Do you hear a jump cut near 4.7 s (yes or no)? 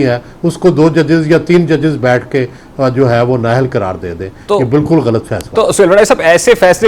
no